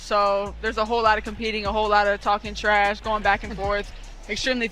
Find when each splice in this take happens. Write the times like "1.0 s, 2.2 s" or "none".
none